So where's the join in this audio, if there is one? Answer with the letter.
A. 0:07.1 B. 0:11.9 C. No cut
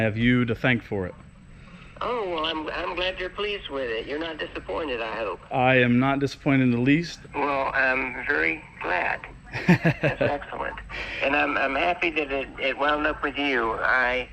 A